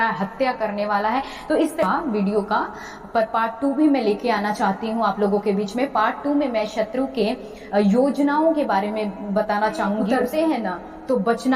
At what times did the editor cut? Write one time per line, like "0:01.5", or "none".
0:01.8
0:10.2